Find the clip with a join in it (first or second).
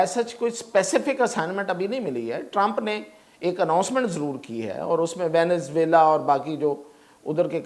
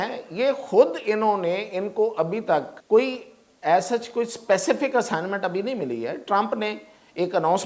second